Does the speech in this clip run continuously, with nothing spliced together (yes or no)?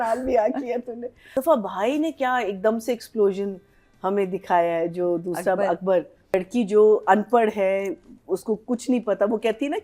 no